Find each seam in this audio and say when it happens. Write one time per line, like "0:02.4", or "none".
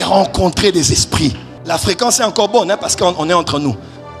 0:01.5